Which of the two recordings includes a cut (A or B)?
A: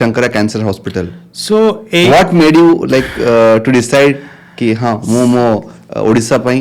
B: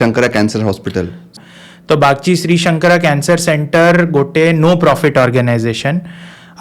B